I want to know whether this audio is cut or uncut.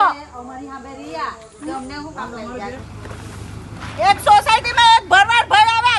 cut